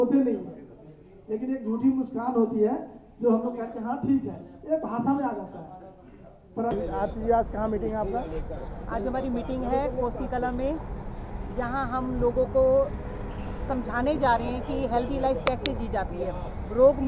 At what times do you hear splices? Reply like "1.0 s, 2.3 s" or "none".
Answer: 6.7 s